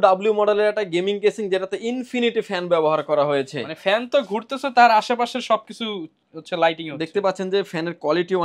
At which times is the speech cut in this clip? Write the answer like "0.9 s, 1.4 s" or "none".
none

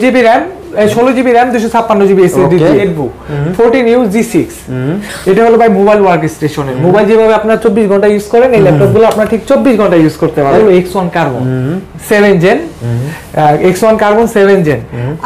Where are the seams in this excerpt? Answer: 2.9 s, 10.6 s

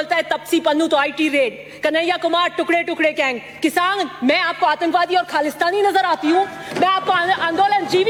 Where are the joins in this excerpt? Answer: none

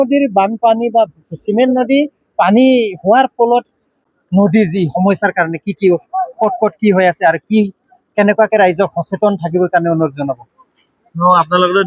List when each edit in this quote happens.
4.0 s

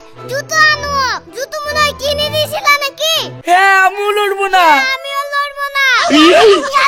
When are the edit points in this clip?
3.3 s

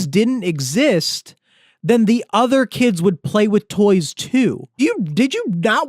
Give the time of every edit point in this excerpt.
4.8 s

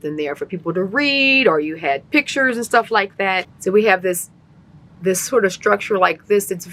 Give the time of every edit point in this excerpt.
3.5 s

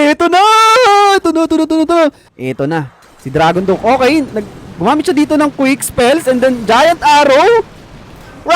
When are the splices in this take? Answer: 2.3 s

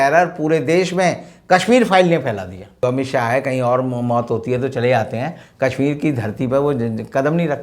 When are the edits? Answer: 2.8 s

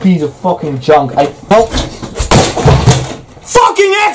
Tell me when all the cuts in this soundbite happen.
1.5 s

